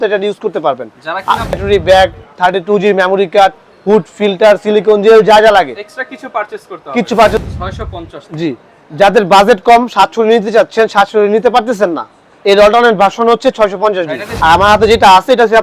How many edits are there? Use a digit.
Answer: 3